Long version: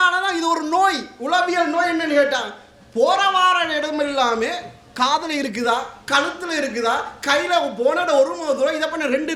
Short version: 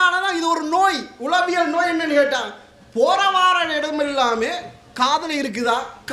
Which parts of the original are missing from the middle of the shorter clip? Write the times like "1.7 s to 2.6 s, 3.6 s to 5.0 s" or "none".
none